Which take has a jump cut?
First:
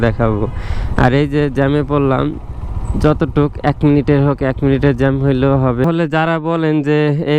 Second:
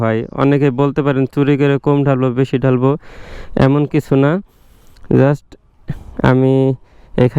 first; 1 cut; at 5.8 s

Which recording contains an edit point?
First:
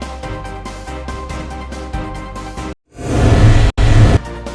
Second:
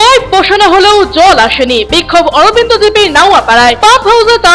first; 1 cut; at 1.1 s

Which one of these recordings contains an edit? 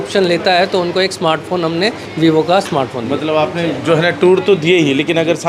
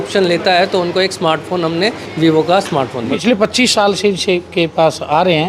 second; 1 cut; at 3.2 s

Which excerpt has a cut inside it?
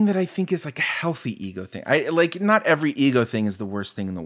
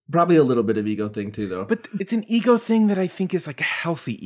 second; 1 cut; at 1.9 s

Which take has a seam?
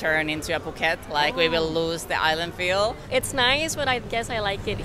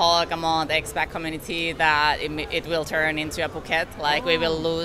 first; 1 cut; at 3.0 s

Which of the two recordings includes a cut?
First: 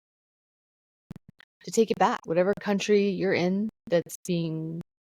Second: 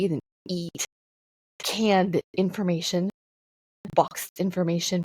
first; 1 cut; at 2.2 s

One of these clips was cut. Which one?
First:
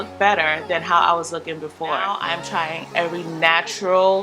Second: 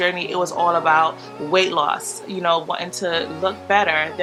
first; 1 cut; at 2.3 s

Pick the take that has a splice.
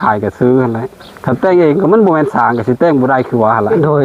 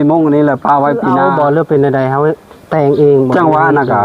second; 1 cut; at 1.3 s

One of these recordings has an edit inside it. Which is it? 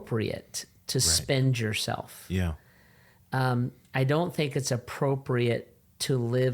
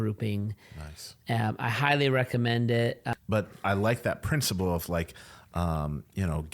second; 1 cut; at 3.1 s

